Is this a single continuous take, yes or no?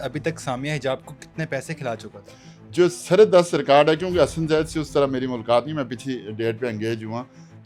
yes